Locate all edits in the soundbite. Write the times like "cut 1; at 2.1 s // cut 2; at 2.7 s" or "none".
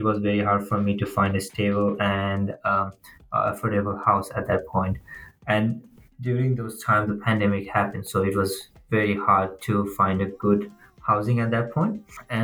none